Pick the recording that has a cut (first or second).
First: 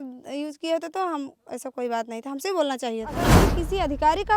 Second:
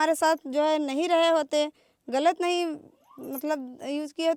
first